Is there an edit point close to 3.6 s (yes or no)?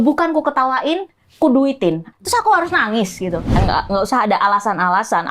yes